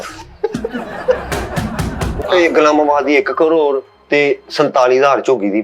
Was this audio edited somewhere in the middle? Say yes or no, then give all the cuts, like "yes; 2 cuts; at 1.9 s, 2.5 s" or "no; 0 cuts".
yes; 1 cut; at 2.1 s